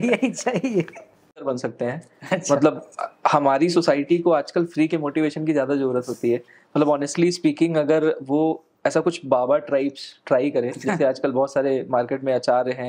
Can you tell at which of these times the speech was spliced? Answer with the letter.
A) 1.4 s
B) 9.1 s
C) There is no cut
A